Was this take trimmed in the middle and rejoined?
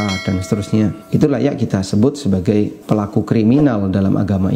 yes; 2 cuts; at 1.0 s, 2.8 s

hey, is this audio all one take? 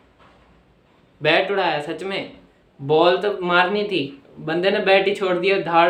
yes; 0 cuts

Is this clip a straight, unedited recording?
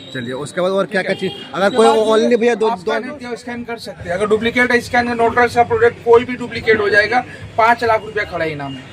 no; 1 cut; at 3.0 s

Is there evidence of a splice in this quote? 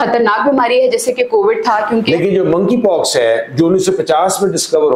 yes; 1 cut; at 2.1 s

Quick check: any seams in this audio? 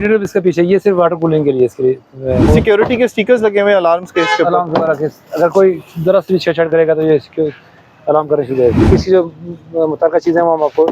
yes; 2 cuts; at 2.5 s, 8.9 s

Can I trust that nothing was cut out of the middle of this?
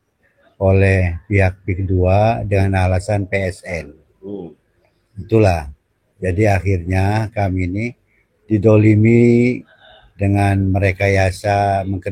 yes; 0 cuts

